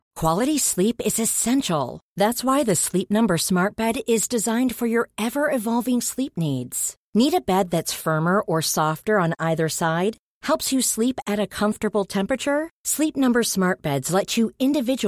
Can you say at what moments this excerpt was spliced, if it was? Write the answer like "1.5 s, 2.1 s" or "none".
none